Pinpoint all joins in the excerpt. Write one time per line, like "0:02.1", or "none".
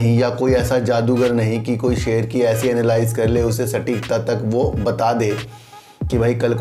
none

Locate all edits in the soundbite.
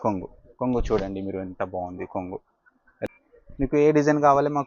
0:02.9

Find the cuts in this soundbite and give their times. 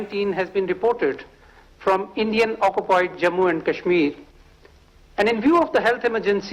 none

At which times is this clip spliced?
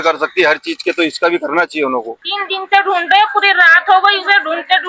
0:02.2

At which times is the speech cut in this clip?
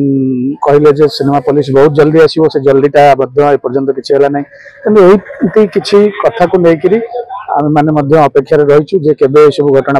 none

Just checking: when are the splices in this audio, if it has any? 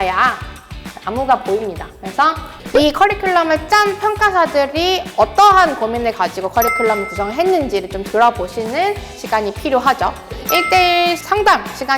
0:02.5
0:10.3
0:11.2

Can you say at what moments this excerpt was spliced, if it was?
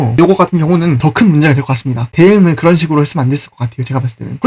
0:01.0
0:02.1

